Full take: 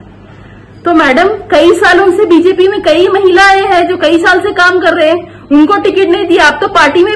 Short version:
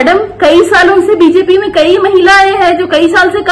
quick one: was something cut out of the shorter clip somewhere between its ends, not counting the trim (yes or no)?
no